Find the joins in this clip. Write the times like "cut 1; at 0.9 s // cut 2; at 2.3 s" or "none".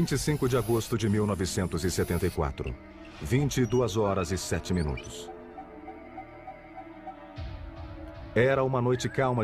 cut 1; at 3.9 s

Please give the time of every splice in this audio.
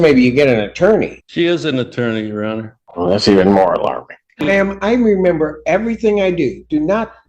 cut 1; at 1.2 s // cut 2; at 2.8 s // cut 3; at 4.5 s

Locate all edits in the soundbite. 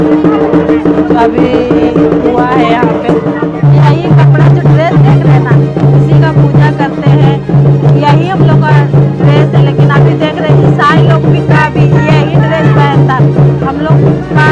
cut 1; at 3.5 s

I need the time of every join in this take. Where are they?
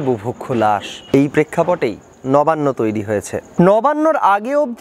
cut 1; at 0.9 s // cut 2; at 3.5 s

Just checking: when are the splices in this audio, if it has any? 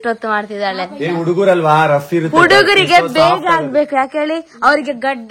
none

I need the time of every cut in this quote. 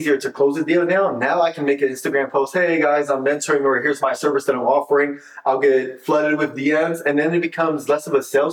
none

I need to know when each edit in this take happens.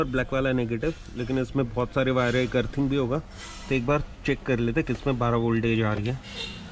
none

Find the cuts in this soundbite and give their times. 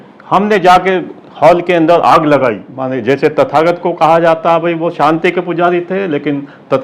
cut 1; at 2.7 s

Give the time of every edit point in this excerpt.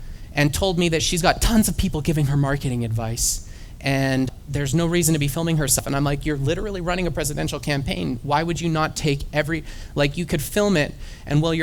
cut 1; at 4.4 s // cut 2; at 5.8 s

